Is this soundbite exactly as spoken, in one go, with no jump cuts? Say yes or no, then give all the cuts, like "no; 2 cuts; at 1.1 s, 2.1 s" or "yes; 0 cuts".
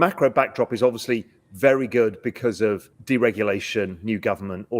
no; 1 cut; at 2.9 s